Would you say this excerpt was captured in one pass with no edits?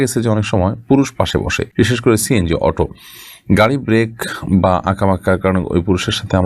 no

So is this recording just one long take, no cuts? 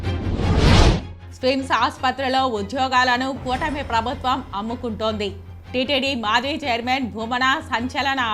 no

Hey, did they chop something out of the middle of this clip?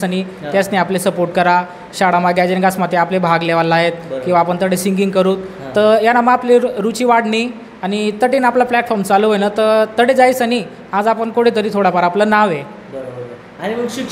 no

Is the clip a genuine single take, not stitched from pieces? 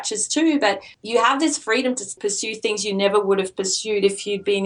no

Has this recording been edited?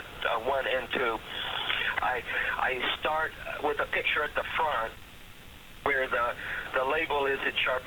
yes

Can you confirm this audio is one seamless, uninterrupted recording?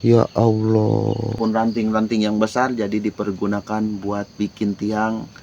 no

